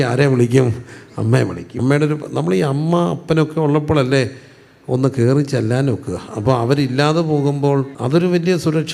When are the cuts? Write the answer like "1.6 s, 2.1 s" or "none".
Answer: 1.7 s, 8.0 s